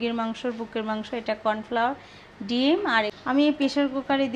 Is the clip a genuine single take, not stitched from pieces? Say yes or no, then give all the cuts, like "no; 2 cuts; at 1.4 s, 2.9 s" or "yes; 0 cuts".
no; 1 cut; at 3.1 s